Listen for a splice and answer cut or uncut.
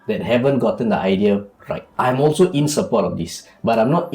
cut